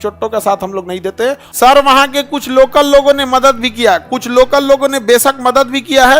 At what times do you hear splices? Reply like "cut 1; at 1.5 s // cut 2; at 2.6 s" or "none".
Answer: cut 1; at 1.5 s

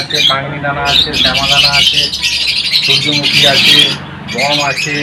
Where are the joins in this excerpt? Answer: none

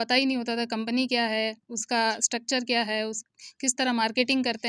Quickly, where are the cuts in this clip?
none

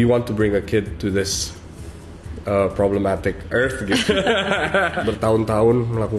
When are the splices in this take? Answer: cut 1; at 5.0 s

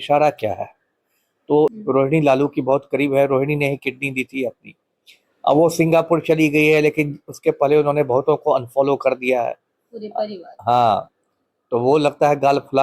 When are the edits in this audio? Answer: cut 1; at 1.8 s

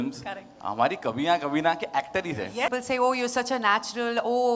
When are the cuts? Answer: cut 1; at 2.7 s

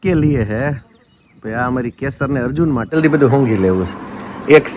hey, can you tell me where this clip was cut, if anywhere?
cut 1; at 2.9 s

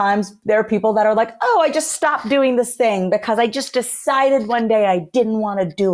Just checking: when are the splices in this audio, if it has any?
none

